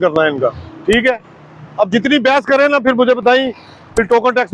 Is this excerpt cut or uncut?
uncut